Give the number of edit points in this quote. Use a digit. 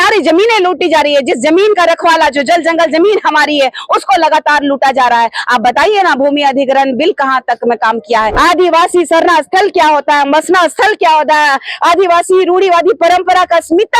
1